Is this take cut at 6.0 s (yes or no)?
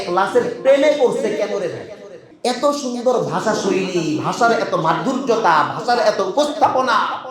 no